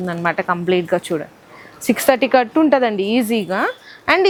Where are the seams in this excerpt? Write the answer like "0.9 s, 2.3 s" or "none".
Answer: none